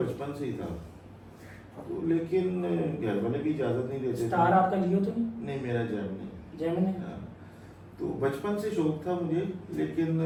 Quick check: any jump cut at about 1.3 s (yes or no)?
no